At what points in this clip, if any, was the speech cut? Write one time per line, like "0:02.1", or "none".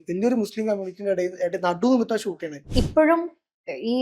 0:02.7